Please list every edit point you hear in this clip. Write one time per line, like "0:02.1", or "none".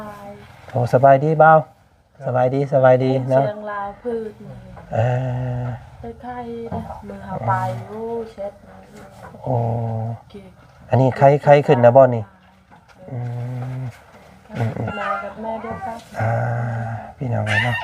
0:14.9